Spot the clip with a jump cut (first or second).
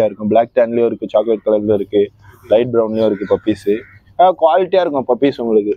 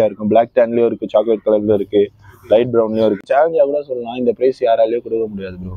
second